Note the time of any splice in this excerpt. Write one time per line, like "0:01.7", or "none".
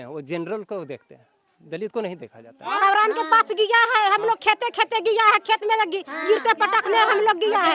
0:02.7